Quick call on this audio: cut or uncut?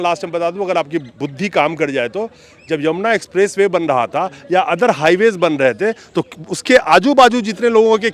uncut